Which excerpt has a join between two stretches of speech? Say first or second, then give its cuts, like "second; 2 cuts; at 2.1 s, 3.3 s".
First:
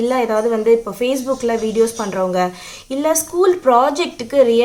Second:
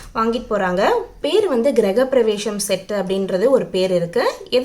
second; 1 cut; at 1.1 s